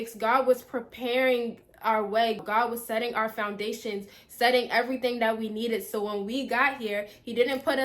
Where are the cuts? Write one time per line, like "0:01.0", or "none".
0:02.4